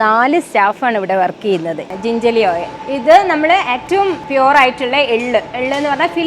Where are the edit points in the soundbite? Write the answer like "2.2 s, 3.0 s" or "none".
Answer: 1.9 s, 2.8 s, 4.0 s